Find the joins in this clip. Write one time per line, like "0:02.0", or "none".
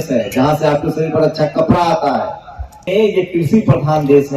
0:02.8